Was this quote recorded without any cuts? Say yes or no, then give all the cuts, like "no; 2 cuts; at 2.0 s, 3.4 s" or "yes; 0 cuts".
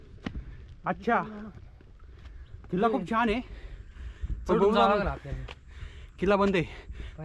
yes; 0 cuts